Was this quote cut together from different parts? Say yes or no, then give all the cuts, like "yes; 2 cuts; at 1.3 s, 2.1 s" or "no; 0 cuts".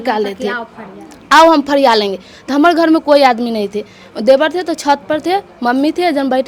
no; 0 cuts